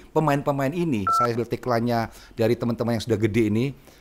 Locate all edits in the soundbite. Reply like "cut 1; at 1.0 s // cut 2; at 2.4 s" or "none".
cut 1; at 1.3 s